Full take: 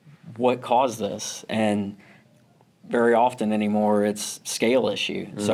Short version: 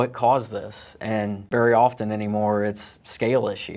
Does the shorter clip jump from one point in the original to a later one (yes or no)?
yes